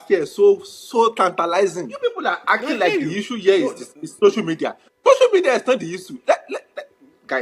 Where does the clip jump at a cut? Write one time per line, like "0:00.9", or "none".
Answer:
0:01.9